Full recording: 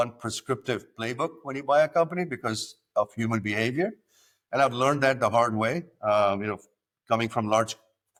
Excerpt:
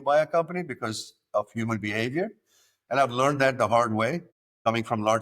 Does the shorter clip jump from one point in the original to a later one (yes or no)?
yes